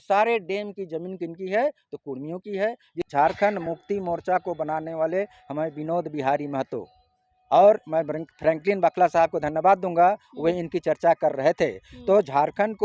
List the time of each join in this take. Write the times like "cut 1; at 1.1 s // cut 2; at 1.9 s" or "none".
cut 1; at 3.1 s